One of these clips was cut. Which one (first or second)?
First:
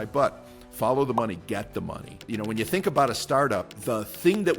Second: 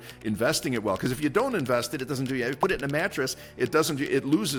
first